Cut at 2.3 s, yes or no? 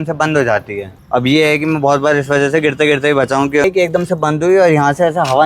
no